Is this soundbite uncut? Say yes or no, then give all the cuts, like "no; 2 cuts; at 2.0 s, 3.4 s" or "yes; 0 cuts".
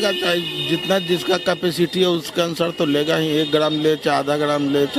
yes; 0 cuts